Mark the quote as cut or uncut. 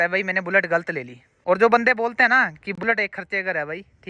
cut